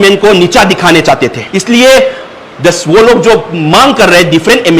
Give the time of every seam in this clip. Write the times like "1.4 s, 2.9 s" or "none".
1.5 s